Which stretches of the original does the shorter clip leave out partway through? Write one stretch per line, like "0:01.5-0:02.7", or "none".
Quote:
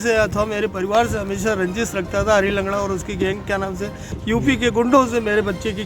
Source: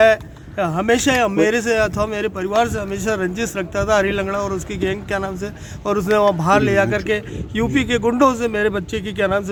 0:05.7-0:07.4